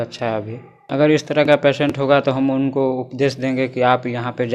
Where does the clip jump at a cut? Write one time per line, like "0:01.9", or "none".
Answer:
none